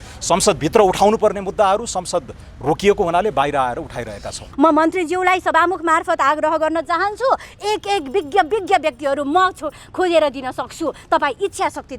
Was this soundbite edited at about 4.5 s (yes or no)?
yes